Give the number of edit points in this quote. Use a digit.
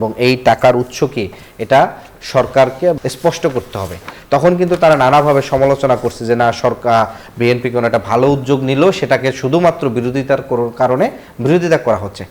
1